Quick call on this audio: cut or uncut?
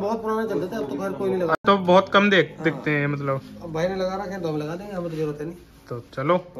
uncut